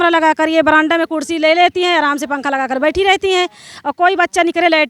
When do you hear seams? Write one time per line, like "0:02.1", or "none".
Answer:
none